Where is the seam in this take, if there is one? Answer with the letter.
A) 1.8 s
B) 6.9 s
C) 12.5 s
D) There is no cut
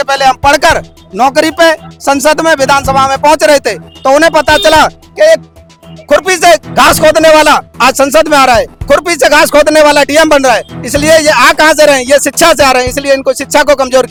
D